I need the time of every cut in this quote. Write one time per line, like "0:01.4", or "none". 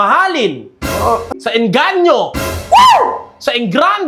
0:01.3